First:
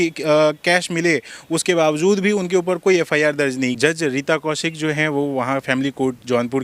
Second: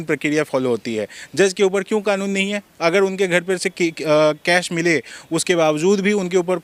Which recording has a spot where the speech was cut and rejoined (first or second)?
first